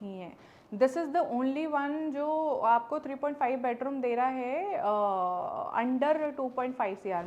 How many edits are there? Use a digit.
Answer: 0